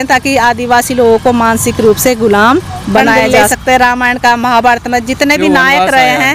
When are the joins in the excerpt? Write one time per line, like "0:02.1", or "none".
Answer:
0:03.6